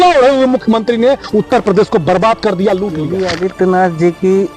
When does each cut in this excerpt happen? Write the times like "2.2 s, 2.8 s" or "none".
3.2 s